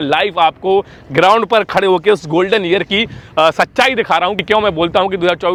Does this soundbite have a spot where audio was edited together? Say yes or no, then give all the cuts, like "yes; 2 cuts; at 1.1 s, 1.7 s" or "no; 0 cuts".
no; 0 cuts